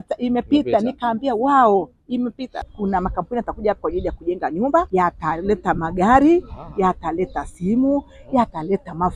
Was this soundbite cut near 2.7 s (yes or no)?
yes